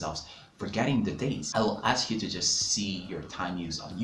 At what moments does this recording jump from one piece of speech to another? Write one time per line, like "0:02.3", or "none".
0:01.4